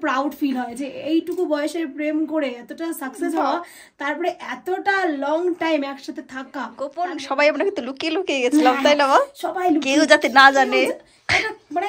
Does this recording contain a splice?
yes; 1 cut; at 6.8 s

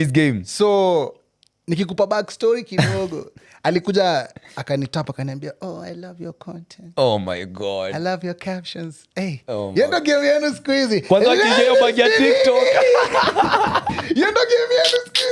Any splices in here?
no; 0 cuts

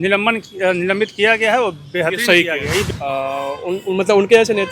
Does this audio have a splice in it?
yes; 1 cut; at 2.9 s

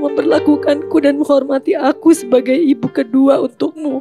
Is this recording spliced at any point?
no; 0 cuts

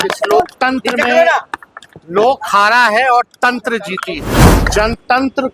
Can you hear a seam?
yes; 1 cut; at 4.6 s

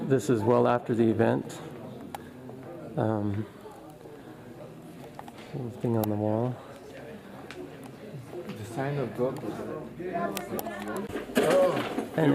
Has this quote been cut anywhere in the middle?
yes; 1 cut; at 1.0 s

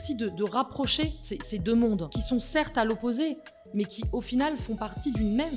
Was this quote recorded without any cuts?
no; 2 cuts; at 1.3 s, 2.1 s

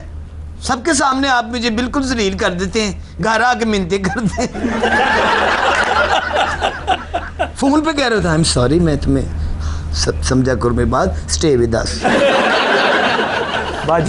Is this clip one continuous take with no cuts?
yes; 0 cuts

